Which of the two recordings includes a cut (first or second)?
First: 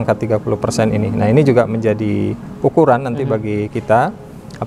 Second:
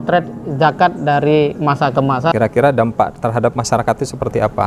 second